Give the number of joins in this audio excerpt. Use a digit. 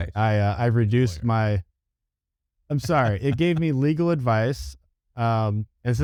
0